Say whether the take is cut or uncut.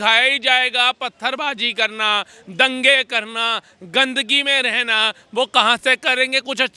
uncut